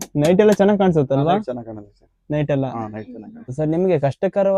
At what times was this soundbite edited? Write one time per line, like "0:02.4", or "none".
0:03.5